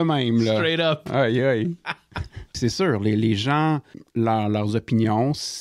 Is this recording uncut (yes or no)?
no